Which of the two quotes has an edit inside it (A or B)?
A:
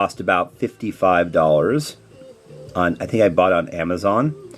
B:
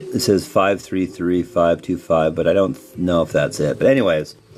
A